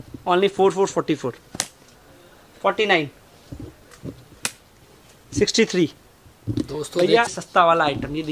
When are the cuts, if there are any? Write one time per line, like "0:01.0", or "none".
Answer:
0:07.3